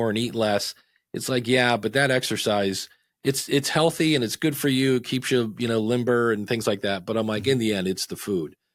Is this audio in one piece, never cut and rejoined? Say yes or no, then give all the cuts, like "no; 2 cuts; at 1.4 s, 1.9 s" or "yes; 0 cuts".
yes; 0 cuts